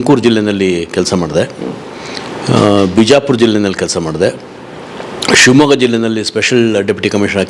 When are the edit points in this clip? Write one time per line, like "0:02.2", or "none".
none